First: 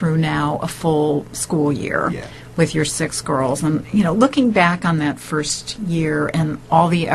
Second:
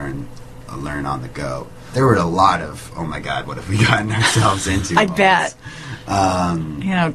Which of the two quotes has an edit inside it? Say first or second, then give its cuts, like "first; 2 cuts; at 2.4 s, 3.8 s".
first; 1 cut; at 3.0 s